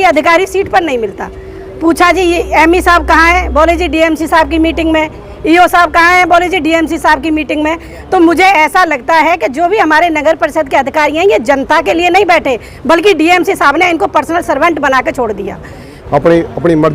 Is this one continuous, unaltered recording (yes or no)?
no